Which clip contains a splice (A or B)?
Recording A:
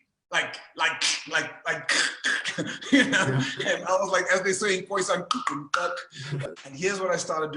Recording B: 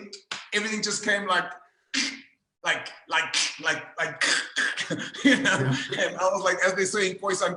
A